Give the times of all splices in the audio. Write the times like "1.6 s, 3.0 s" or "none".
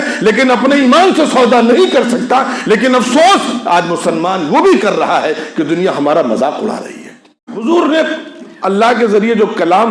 7.6 s